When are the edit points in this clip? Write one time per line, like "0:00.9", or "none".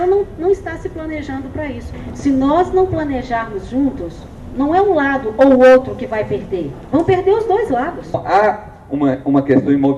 0:02.0
0:08.2

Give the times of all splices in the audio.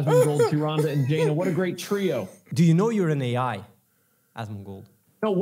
0:02.5

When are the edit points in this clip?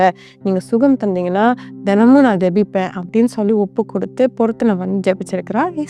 none

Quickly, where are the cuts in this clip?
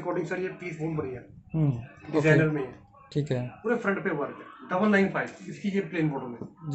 none

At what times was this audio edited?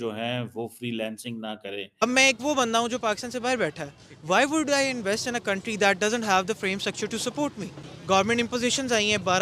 0:01.9

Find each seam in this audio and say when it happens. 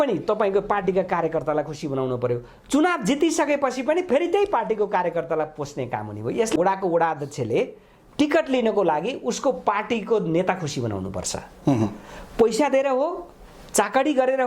0:06.6

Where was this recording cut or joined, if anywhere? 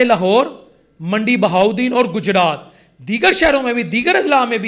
none

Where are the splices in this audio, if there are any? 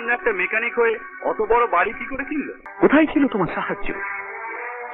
0:02.6

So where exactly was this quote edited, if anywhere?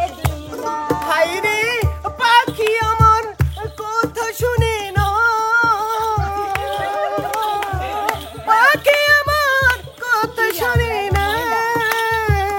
none

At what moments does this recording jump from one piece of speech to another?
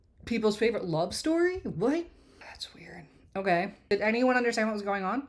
0:03.8

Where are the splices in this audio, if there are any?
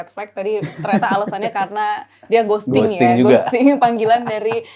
none

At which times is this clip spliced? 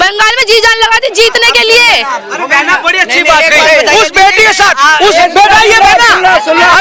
none

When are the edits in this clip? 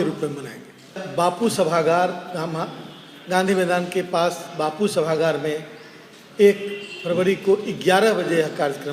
0:01.0

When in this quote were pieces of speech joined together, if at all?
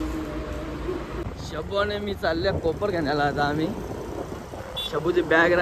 0:01.3

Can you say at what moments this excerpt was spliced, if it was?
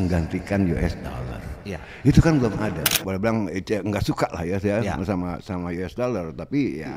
0:03.0

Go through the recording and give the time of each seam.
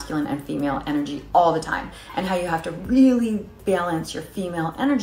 0:01.4

